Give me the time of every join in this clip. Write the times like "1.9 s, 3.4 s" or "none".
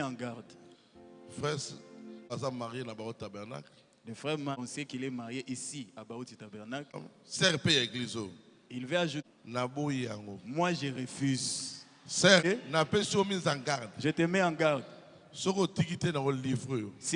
2.3 s, 4.6 s, 7.0 s, 9.2 s, 12.4 s